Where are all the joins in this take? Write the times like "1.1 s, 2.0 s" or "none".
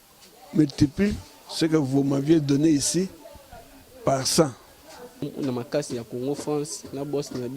5.2 s